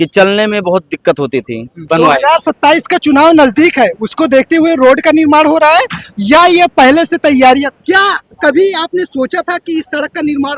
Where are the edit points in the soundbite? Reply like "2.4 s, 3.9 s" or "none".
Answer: 1.8 s, 7.7 s